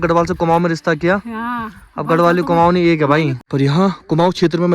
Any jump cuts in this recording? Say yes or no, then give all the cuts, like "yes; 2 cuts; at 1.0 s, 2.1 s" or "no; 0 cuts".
yes; 1 cut; at 3.4 s